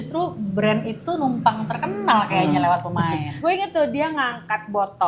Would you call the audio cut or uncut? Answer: cut